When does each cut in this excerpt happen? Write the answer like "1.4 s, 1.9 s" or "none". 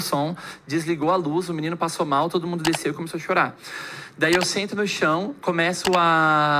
none